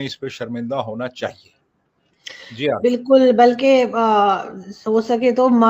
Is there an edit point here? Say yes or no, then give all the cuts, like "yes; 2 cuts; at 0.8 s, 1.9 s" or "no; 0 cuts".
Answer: no; 0 cuts